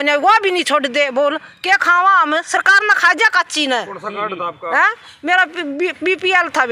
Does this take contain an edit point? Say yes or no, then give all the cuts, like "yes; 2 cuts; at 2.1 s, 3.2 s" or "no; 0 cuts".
no; 0 cuts